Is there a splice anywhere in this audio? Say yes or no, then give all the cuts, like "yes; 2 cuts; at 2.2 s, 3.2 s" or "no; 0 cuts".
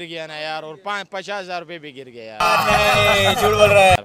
no; 0 cuts